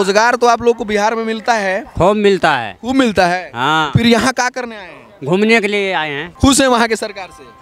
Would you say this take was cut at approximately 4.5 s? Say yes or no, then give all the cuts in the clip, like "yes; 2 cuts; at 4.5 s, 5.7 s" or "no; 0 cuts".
no; 2 cuts; at 1.9 s, 6.2 s